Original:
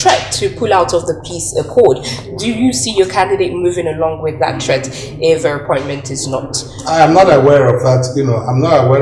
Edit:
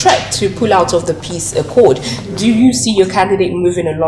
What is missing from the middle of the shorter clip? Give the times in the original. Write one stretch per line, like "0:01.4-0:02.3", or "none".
none